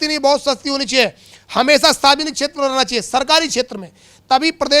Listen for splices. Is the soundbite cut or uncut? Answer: uncut